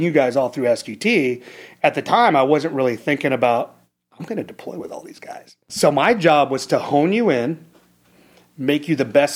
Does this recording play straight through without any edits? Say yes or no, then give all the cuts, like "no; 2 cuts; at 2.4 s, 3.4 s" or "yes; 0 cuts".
no; 1 cut; at 5.6 s